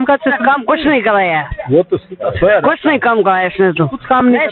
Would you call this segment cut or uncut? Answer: uncut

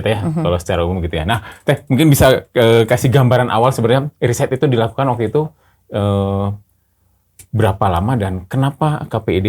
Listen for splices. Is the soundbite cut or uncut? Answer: uncut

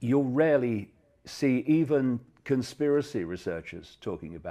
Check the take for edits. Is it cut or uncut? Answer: uncut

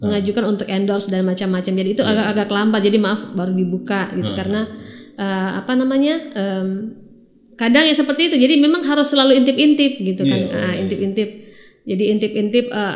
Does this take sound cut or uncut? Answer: uncut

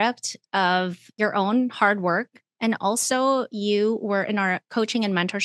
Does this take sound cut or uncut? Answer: uncut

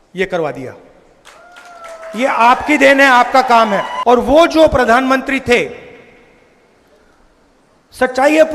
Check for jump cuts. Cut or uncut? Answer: cut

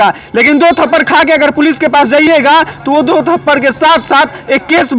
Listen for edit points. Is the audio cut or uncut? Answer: uncut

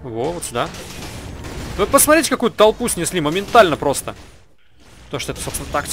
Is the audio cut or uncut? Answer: cut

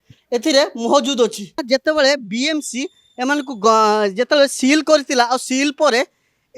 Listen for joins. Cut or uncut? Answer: cut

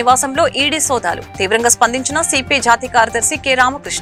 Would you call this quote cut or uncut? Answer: uncut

